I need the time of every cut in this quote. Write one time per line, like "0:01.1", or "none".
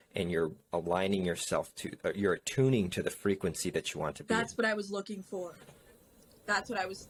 none